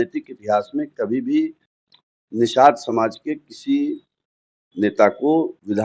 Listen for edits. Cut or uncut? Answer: uncut